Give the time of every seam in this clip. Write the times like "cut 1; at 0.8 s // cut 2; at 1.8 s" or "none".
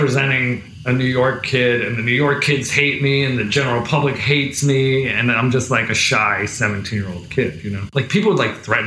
cut 1; at 7.9 s